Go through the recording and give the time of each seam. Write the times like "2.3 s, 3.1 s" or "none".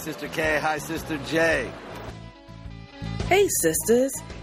none

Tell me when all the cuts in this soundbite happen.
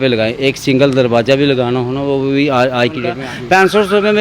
3.3 s

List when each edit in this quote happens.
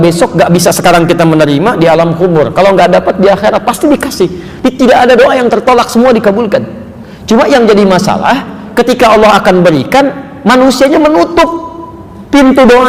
none

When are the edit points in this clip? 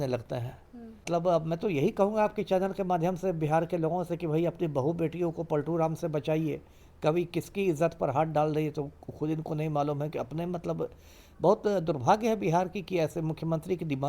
1.1 s

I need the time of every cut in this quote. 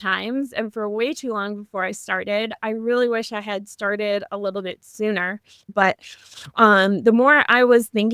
5.7 s

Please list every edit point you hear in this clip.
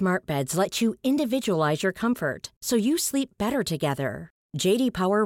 none

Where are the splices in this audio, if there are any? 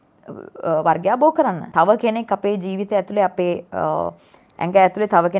1.6 s

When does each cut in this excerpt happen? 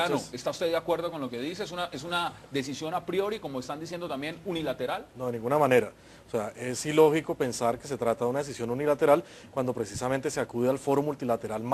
2.8 s

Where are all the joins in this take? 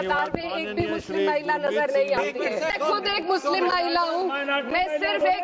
2.7 s

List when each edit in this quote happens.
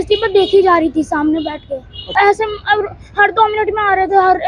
2.0 s

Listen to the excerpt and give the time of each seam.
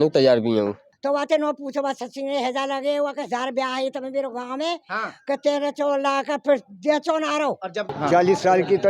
0.9 s, 7.9 s

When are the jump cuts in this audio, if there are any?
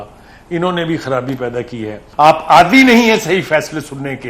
2.0 s

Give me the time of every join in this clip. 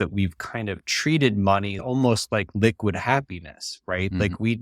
1.8 s

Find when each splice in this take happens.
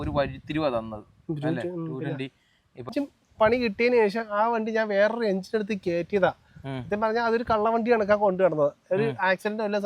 2.9 s

